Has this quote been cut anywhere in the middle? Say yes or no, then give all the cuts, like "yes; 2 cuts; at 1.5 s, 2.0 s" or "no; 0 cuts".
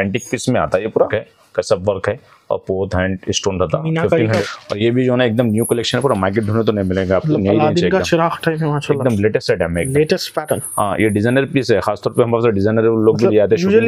yes; 2 cuts; at 0.9 s, 4.4 s